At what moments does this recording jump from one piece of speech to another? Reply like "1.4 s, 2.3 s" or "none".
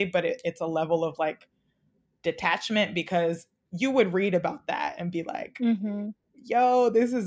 none